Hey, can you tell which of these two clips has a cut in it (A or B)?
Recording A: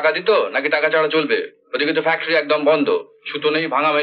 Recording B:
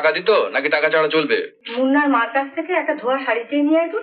B